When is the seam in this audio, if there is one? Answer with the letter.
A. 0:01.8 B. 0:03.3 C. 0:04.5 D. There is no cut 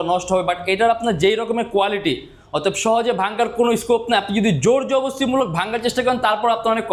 D